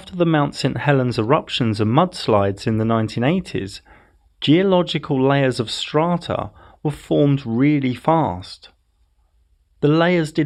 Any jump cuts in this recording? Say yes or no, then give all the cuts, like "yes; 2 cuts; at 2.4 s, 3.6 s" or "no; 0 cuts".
no; 0 cuts